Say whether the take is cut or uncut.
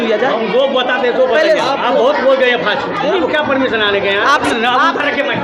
cut